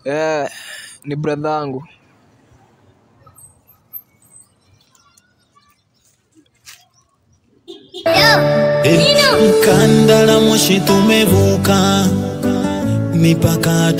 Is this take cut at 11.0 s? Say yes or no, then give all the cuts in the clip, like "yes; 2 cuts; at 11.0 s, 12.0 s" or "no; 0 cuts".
no; 1 cut; at 8.0 s